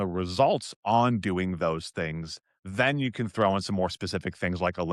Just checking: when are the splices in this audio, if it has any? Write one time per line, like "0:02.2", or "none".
none